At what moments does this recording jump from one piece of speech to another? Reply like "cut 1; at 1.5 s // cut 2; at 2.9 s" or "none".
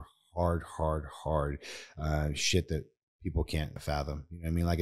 cut 1; at 3.8 s